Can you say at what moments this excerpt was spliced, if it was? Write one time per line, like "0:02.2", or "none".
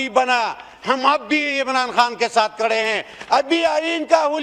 none